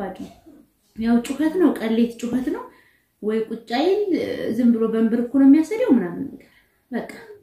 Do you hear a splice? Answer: no; 0 cuts

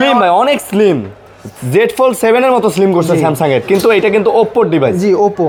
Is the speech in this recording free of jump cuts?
yes; 0 cuts

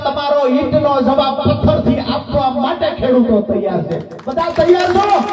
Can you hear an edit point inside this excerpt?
no; 0 cuts

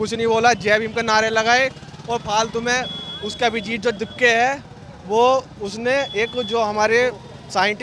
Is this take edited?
no; 0 cuts

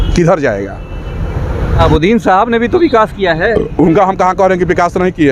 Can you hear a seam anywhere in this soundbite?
yes; 1 cut; at 1.8 s

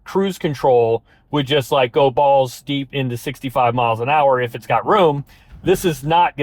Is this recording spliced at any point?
no; 0 cuts

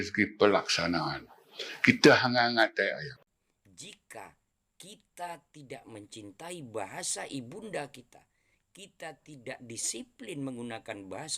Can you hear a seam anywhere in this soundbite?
yes; 1 cut; at 3.1 s

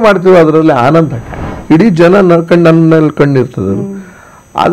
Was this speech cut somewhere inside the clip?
yes; 1 cut; at 1.5 s

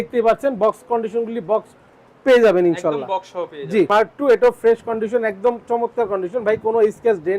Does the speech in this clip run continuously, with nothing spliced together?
no; 1 cut; at 3.9 s

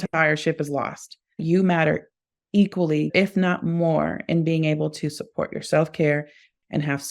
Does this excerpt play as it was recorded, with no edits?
no; 2 cuts; at 1.4 s, 3.1 s

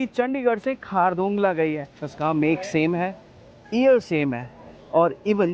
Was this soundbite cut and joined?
yes; 1 cut; at 2.1 s

